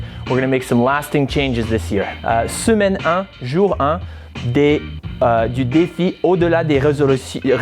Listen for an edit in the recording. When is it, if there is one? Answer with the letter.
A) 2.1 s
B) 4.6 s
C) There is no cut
A